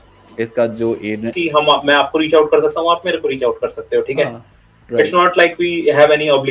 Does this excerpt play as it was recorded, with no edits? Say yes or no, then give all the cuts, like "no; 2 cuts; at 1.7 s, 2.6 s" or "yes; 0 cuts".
no; 1 cut; at 1.3 s